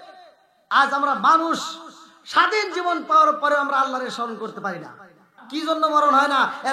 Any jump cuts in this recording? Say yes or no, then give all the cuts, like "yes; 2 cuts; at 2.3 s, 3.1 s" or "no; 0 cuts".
yes; 1 cut; at 5.4 s